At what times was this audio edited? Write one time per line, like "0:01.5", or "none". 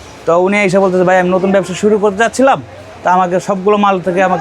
none